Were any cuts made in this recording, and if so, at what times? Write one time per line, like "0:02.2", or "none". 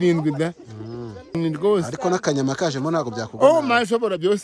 0:01.4